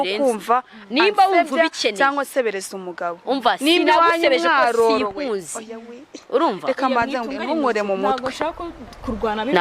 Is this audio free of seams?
yes; 0 cuts

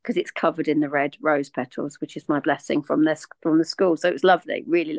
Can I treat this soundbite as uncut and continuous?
yes; 0 cuts

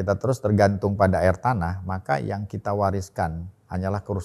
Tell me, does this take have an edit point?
no; 0 cuts

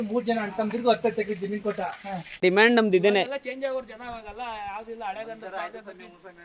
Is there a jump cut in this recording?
yes; 1 cut; at 2.4 s

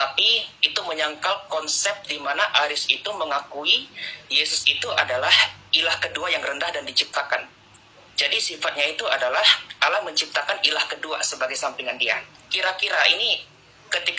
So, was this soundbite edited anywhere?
yes; 1 cut; at 12.4 s

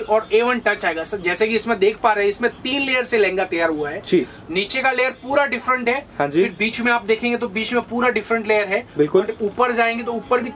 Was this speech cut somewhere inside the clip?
no; 0 cuts

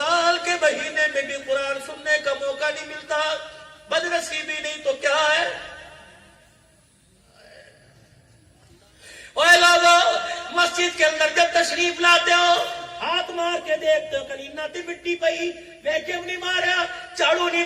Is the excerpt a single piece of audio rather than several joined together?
no; 1 cut; at 7.5 s

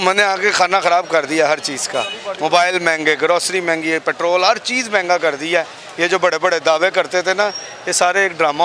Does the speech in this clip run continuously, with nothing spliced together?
yes; 0 cuts

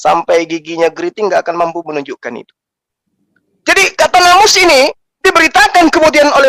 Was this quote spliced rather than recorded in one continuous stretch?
no; 0 cuts

